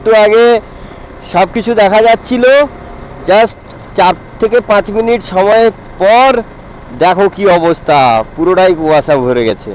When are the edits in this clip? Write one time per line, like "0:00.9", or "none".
none